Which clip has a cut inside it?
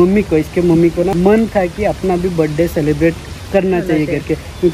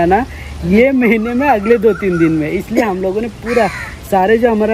first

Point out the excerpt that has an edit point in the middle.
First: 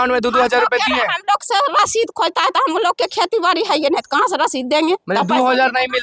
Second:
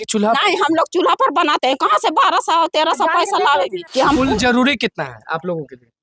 second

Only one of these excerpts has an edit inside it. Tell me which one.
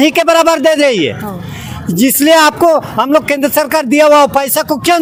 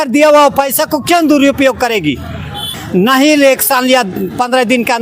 second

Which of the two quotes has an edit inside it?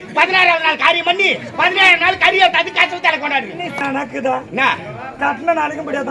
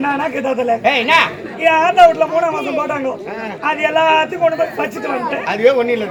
first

